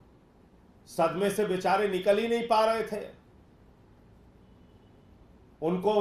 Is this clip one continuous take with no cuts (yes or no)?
yes